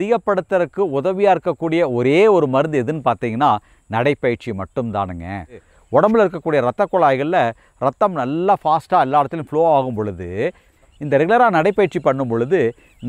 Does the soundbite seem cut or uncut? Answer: cut